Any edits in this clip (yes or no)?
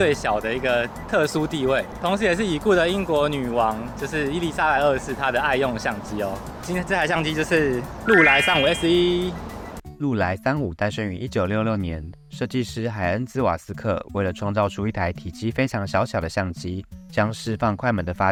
no